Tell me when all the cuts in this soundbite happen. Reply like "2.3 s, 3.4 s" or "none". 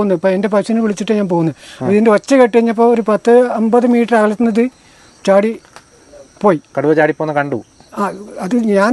none